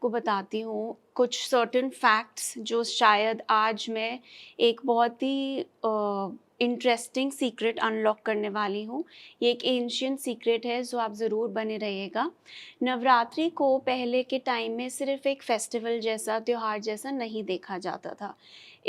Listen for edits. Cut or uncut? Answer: uncut